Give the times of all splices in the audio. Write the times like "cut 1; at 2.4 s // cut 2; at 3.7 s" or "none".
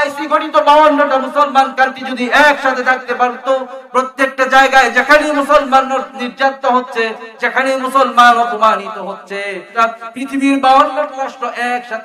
cut 1; at 9.7 s